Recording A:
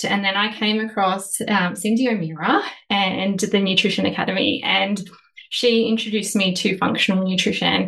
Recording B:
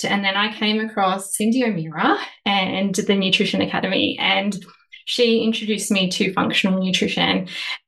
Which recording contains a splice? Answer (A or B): B